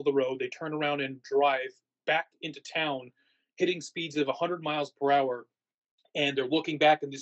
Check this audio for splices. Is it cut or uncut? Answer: uncut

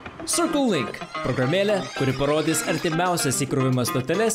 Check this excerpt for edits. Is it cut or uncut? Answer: uncut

